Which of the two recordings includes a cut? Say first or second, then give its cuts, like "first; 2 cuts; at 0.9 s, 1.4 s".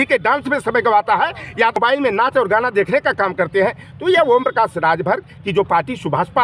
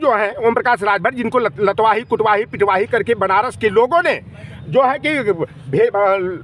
first; 1 cut; at 1.8 s